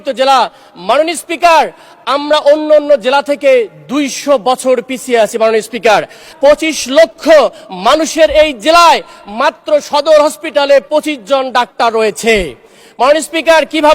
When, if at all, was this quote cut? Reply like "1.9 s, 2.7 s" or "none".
6.2 s